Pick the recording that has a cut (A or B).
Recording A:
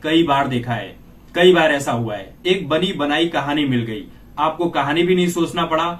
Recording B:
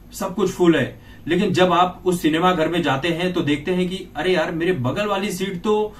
A